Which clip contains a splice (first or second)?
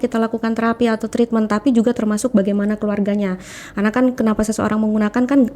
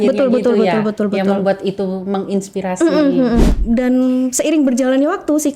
second